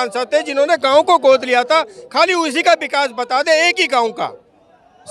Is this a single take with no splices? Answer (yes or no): yes